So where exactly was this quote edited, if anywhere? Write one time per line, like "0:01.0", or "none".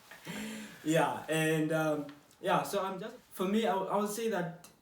0:03.0

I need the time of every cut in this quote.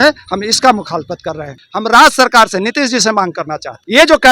none

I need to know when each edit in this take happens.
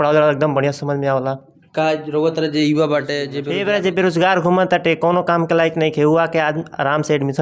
0:03.3

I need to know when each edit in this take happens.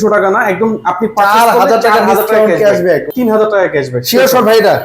0:03.1

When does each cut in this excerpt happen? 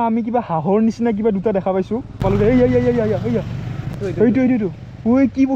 0:02.2
0:03.9

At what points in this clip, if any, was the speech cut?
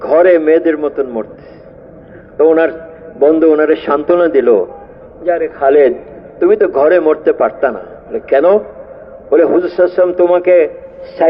none

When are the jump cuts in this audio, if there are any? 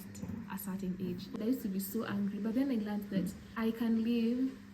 0:01.4
0:03.4

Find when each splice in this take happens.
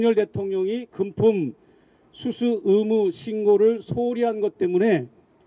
none

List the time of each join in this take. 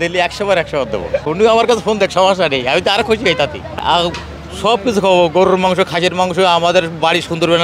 0:01.3
0:03.8

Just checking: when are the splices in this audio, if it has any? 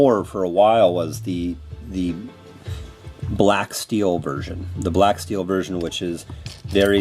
0:01.2

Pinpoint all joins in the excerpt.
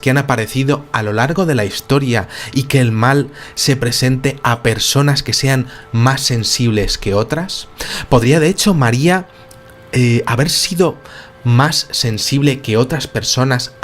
0:01.2

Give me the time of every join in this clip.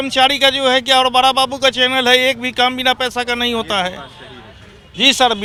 none

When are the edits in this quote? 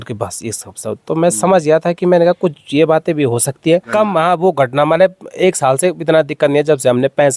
0:03.9

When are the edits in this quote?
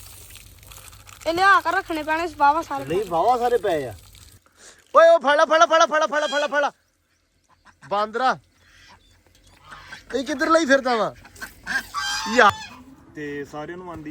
0:04.3
0:12.5

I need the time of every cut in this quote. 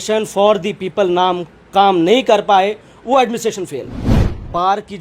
0:04.1

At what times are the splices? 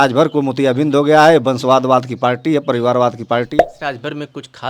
0:03.5

